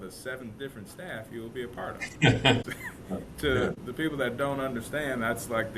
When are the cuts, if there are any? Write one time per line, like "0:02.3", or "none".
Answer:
0:02.7
0:03.8